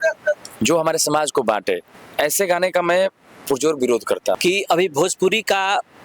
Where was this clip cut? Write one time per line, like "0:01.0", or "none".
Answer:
0:04.4